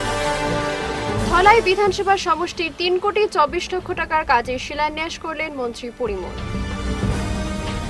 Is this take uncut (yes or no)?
no